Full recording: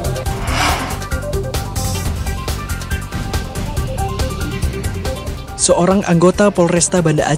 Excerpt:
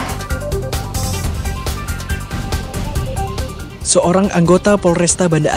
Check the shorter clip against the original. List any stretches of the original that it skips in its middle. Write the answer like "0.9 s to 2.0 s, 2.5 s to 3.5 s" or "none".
4.5 s to 5.4 s

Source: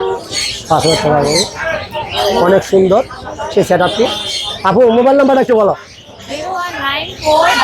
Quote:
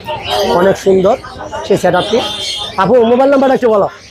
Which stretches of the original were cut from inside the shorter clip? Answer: none

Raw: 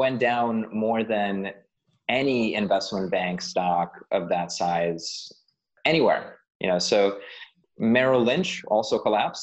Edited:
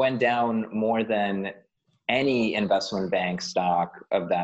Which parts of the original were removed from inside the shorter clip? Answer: none

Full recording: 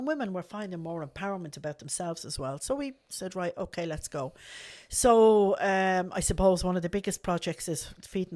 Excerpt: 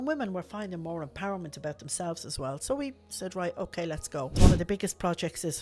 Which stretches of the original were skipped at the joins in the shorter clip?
4.4 s to 6.6 s

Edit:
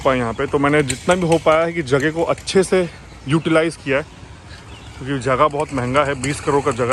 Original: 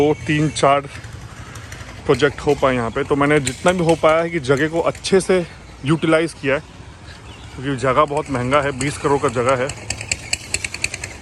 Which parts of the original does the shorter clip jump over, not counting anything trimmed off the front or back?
none

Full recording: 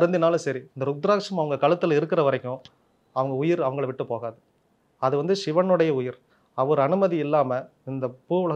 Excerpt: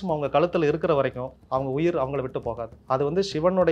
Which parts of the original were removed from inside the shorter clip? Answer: 2.6 s to 2.9 s, 4.3 s to 4.8 s

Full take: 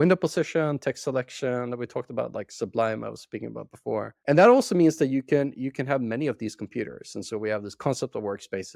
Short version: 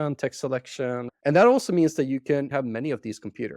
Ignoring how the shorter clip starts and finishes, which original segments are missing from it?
1.7 s to 4.1 s, 5.5 s to 5.9 s

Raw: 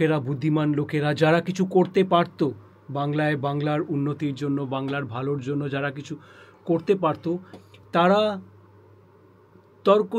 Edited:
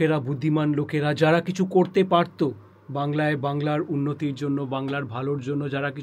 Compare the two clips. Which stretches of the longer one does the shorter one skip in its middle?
none

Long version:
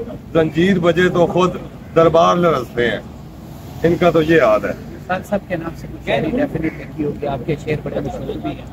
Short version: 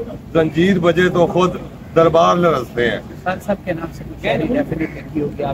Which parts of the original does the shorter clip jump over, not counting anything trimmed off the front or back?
3.1 s to 4.9 s

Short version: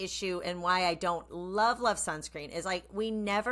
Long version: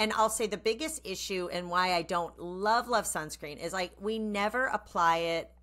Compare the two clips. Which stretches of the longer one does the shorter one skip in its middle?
none

